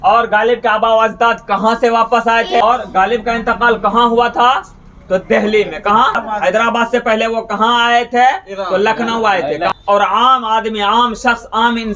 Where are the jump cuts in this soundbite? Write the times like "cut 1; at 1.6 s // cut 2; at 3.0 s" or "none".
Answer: cut 1; at 2.6 s // cut 2; at 6.2 s // cut 3; at 9.7 s